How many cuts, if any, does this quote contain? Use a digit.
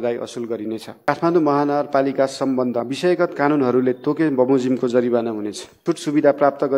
3